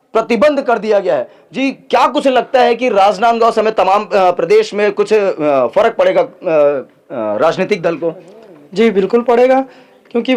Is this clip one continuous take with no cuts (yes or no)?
yes